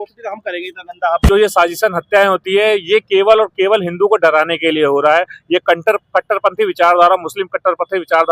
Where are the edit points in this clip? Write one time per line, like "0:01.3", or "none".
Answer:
0:01.2